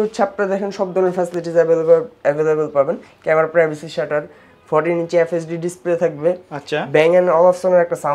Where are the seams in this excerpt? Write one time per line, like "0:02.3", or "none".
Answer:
none